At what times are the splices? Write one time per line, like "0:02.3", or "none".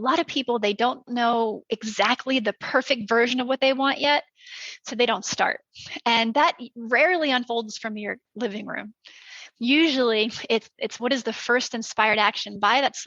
0:01.1

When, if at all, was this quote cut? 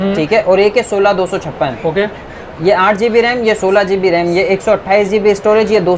none

